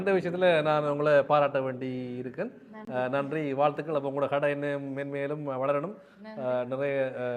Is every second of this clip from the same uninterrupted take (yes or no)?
yes